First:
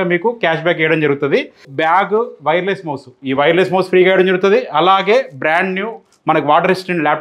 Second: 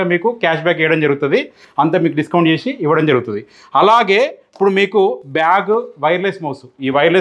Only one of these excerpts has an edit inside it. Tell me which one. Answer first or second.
first